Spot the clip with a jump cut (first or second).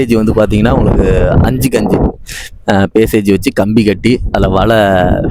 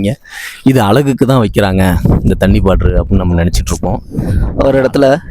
second